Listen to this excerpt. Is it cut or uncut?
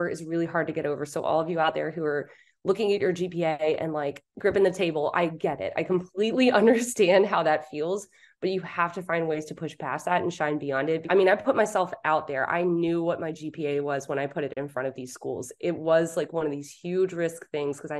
cut